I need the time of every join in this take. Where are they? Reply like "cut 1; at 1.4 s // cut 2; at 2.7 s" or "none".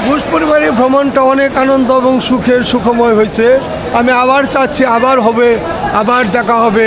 none